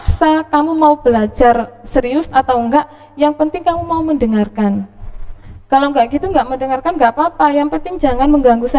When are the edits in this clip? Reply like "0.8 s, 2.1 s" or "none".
none